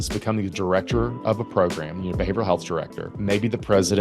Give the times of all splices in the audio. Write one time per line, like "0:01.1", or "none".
0:03.0